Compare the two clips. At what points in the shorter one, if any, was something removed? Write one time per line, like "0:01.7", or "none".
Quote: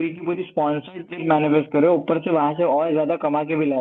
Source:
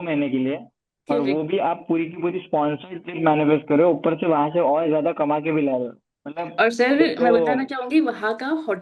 none